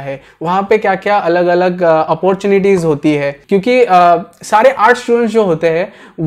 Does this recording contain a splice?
yes; 1 cut; at 3.3 s

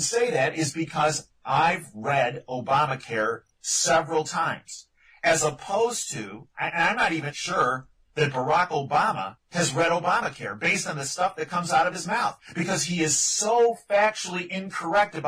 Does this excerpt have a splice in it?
no; 0 cuts

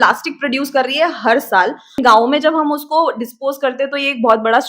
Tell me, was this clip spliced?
yes; 1 cut; at 2.0 s

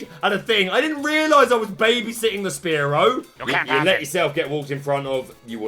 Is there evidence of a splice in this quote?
yes; 1 cut; at 3.3 s

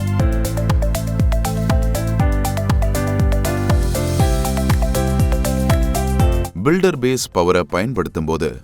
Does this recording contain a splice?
no; 0 cuts

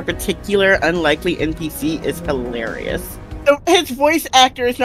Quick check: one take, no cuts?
no; 1 cut; at 3.3 s

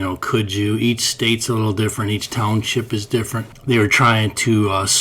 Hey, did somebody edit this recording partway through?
yes; 1 cut; at 3.5 s

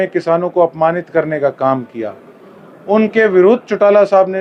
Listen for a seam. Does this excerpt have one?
no; 0 cuts

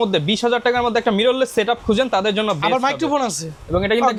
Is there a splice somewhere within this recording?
no; 0 cuts

